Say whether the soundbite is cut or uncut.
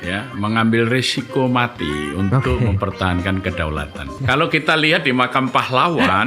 cut